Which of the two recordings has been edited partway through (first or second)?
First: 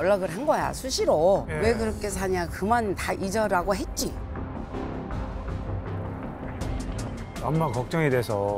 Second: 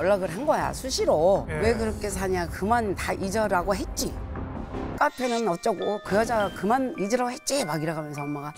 second